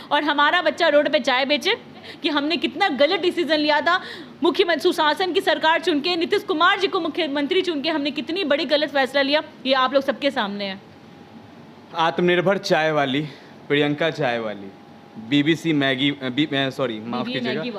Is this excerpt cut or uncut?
uncut